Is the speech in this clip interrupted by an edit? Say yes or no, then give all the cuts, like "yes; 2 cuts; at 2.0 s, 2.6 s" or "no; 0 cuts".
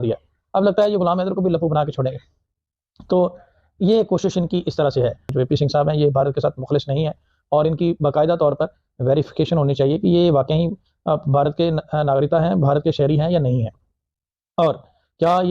yes; 1 cut; at 5.2 s